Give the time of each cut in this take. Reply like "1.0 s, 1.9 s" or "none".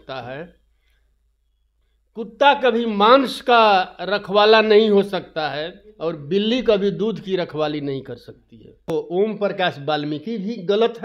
8.9 s